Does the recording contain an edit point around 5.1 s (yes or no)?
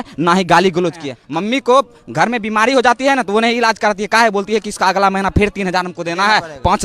no